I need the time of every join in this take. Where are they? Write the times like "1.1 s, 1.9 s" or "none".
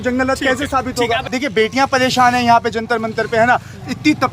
1.3 s